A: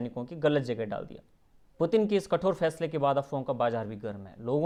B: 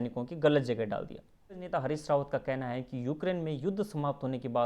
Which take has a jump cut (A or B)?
B